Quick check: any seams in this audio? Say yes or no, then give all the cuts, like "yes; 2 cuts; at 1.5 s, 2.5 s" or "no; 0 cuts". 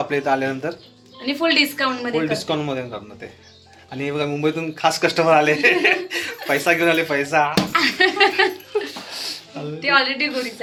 no; 0 cuts